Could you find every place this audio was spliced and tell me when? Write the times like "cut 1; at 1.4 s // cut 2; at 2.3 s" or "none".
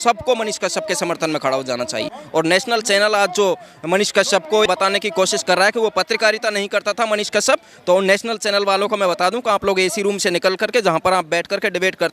cut 1; at 2.2 s // cut 2; at 4.6 s